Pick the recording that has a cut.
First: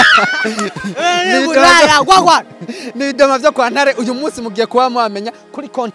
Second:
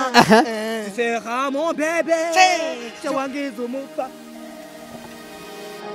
second; 1 cut; at 4.1 s

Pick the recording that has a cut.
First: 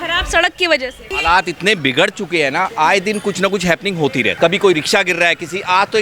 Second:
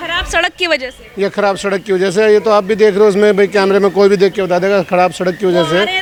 first; 1 cut; at 1.1 s

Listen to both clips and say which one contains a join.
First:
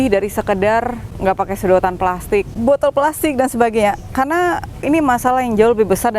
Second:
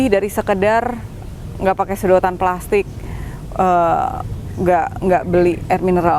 first; 3 cuts; at 1.0 s, 2.5 s, 4.8 s

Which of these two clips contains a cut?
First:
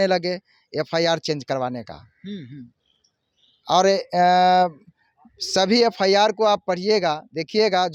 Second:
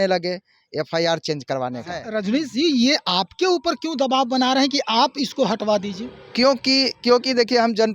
second; 1 cut; at 2.0 s

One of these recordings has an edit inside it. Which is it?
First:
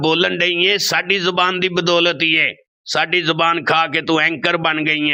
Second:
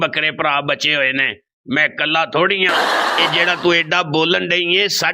second; 1 cut; at 2.7 s

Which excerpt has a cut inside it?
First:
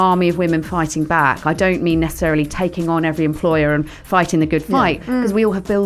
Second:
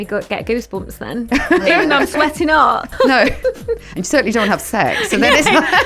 second; 1 cut; at 2.9 s

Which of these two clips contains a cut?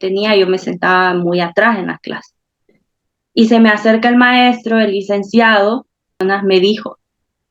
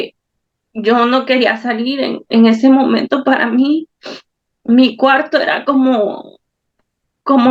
first; 1 cut; at 6.1 s

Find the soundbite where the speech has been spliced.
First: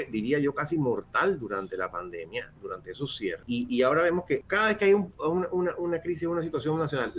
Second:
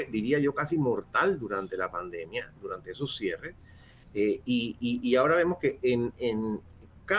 first; 2 cuts; at 3.4 s, 4.4 s

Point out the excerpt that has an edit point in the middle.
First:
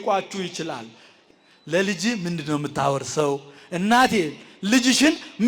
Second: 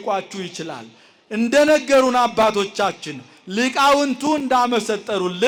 first; 1 cut; at 1.1 s

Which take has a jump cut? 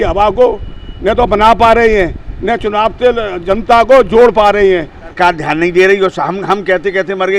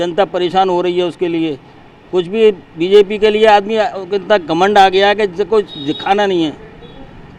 first; 1 cut; at 5.1 s

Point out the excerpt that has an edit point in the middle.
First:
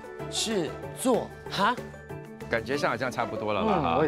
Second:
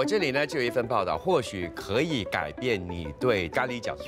first; 1 cut; at 2.2 s

